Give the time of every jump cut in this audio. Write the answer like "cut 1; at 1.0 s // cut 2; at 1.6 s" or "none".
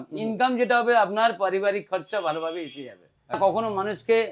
cut 1; at 3.4 s